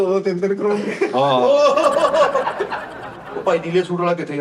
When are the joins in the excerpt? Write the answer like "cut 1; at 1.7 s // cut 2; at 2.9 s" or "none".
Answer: cut 1; at 2.9 s